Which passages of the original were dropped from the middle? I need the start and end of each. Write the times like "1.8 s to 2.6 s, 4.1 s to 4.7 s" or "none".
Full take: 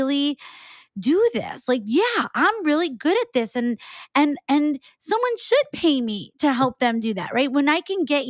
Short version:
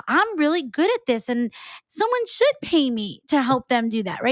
4.0 s to 4.9 s